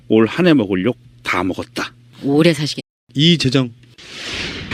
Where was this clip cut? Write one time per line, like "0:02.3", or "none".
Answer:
none